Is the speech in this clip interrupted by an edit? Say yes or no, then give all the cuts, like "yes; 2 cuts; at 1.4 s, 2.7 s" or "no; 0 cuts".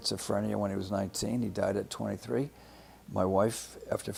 no; 0 cuts